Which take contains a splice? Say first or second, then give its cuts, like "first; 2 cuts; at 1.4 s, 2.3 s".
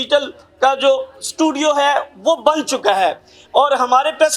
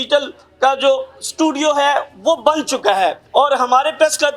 second; 1 cut; at 3.2 s